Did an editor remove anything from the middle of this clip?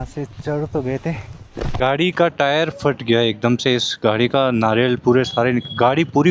yes; 1 cut; at 1.8 s

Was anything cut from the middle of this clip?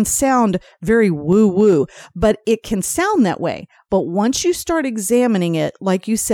no; 0 cuts

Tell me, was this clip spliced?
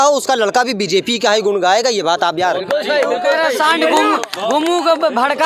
no; 0 cuts

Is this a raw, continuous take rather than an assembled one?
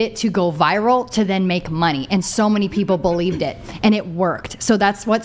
yes; 0 cuts

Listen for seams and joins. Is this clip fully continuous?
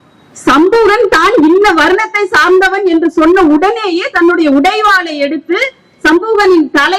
yes; 0 cuts

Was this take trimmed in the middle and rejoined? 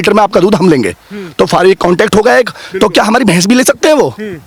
no; 0 cuts

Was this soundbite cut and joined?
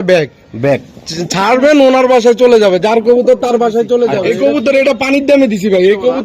yes; 1 cut; at 4.2 s

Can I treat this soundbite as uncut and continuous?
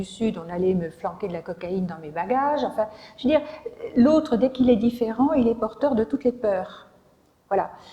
yes; 0 cuts

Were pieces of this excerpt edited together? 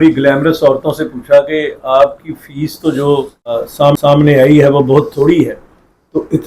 yes; 1 cut; at 3.9 s

